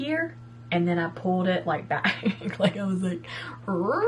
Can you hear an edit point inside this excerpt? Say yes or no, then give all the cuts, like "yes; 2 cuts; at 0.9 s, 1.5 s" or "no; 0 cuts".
no; 0 cuts